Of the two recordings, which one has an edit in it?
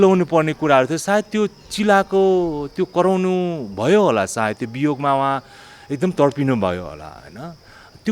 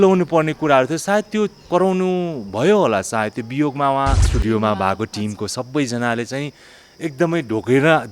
second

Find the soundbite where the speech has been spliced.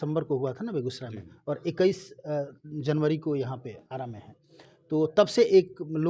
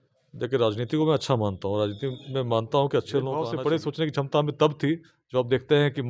second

